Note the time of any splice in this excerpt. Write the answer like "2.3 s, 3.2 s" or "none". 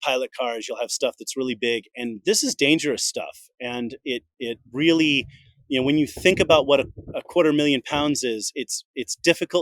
2.2 s